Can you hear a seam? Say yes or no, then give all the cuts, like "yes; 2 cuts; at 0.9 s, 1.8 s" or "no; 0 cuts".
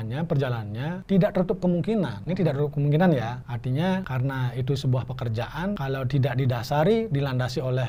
yes; 5 cuts; at 1.0 s, 2.2 s, 3.5 s, 4.1 s, 5.8 s